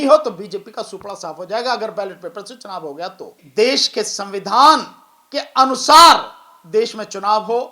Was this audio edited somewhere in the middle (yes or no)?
yes